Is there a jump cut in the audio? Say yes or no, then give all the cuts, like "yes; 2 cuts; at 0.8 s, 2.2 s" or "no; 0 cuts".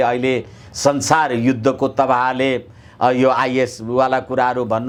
no; 0 cuts